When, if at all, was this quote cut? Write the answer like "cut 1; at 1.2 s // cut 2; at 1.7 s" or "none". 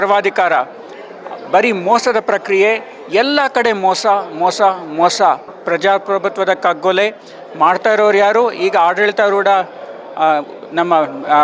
cut 1; at 5.5 s